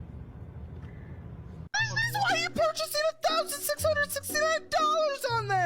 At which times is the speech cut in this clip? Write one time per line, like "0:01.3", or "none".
0:01.7